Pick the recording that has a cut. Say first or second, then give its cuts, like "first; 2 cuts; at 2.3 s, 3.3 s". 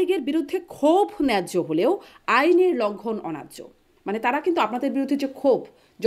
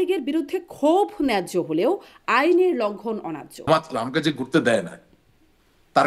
second; 1 cut; at 3.6 s